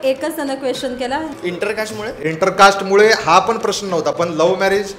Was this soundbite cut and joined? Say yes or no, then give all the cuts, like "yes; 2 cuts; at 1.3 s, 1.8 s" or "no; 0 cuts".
yes; 1 cut; at 1.3 s